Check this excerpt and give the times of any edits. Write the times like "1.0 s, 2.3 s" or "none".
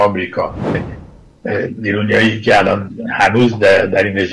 0.9 s